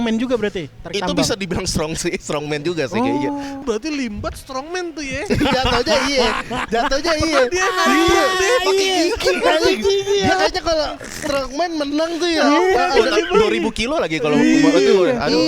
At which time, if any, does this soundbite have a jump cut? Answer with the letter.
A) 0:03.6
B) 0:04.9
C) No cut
A